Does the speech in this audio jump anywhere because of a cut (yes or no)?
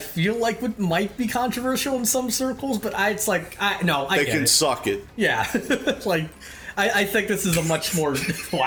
no